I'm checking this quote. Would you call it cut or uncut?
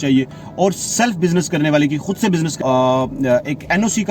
cut